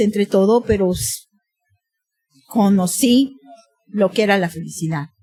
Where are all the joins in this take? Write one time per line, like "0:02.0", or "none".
none